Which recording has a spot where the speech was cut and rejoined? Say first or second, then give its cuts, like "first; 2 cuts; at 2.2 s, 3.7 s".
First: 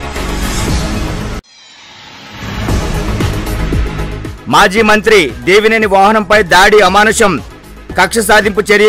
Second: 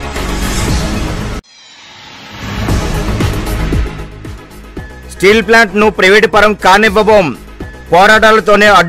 second; 1 cut; at 3.8 s